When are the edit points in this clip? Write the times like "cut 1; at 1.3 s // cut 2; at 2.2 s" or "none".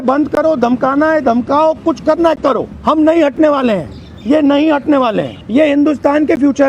cut 1; at 2.7 s // cut 2; at 5.3 s